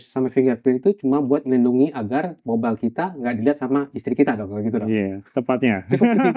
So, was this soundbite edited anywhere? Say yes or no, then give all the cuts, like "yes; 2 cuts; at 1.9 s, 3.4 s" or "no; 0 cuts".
no; 0 cuts